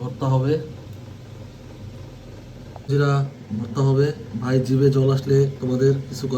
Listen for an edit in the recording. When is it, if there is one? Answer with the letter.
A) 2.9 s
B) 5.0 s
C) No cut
A